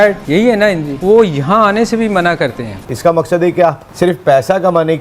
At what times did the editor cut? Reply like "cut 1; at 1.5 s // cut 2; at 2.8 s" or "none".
cut 1; at 2.8 s